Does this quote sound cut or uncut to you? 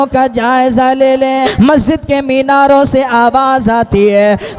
cut